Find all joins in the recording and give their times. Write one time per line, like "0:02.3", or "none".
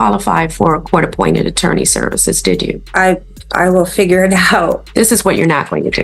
0:02.8
0:04.8